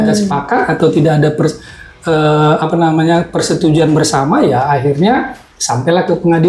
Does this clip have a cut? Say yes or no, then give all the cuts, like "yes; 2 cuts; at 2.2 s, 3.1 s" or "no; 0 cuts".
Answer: no; 0 cuts